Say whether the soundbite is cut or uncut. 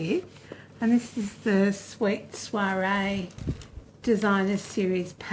uncut